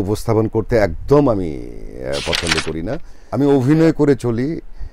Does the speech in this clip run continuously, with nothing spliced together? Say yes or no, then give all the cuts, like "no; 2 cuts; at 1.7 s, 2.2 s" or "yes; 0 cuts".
no; 1 cut; at 3.1 s